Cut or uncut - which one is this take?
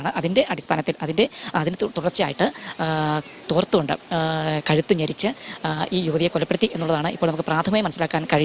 uncut